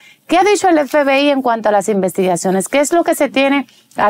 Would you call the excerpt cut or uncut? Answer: uncut